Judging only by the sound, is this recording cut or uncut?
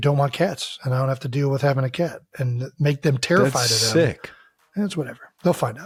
uncut